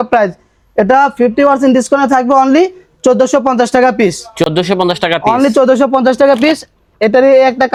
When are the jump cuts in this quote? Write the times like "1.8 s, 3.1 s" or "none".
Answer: none